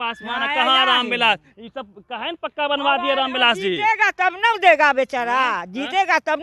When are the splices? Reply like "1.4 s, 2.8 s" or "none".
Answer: none